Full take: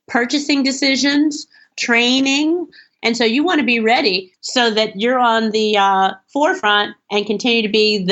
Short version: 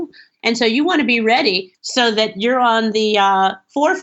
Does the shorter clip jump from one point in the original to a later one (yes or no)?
no